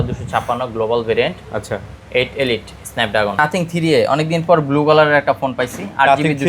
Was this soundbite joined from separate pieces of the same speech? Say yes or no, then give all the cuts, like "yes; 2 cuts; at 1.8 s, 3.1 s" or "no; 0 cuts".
yes; 1 cut; at 3.4 s